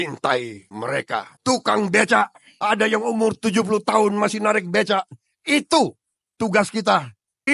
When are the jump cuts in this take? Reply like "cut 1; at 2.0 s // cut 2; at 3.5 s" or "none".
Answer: none